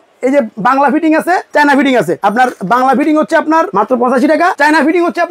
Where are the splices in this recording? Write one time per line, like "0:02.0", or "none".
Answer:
0:01.4
0:02.1
0:03.7
0:04.5